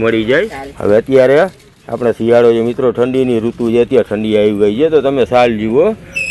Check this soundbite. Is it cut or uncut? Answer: cut